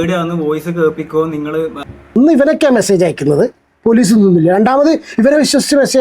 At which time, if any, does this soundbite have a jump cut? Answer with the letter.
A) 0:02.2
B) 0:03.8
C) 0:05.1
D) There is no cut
A